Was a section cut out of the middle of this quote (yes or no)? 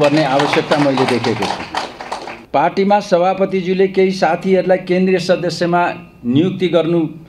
yes